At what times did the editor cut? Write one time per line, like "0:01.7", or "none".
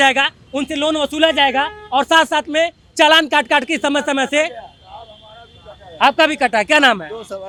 none